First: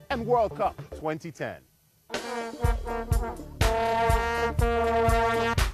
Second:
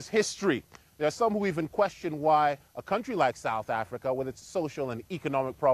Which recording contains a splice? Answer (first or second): first